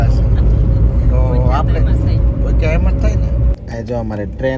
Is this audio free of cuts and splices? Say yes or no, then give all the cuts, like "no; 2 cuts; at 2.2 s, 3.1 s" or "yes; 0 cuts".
no; 1 cut; at 3.6 s